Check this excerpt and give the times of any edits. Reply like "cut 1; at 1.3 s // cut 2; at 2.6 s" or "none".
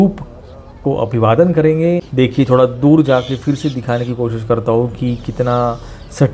cut 1; at 2.1 s